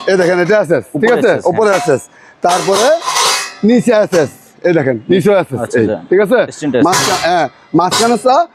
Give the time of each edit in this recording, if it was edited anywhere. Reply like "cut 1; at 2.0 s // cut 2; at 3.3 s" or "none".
none